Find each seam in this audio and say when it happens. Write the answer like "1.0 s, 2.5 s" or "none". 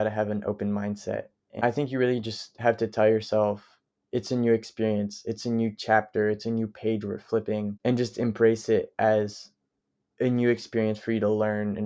1.6 s, 7.7 s